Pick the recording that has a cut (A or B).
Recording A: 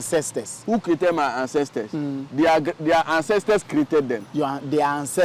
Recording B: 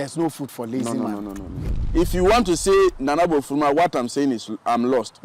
B